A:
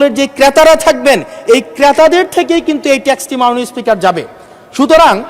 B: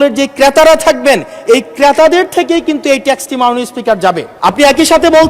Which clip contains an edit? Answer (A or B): B